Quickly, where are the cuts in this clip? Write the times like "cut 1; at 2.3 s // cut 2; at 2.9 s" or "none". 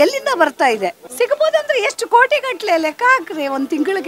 cut 1; at 1.0 s